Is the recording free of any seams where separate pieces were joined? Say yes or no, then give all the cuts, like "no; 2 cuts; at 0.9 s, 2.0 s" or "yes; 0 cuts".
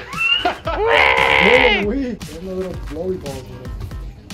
no; 1 cut; at 2.3 s